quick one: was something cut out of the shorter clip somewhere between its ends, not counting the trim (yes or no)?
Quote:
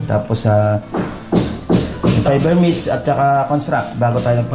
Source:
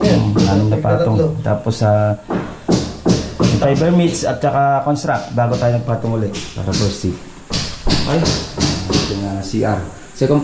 no